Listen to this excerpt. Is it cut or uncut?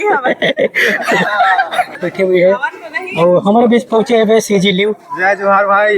cut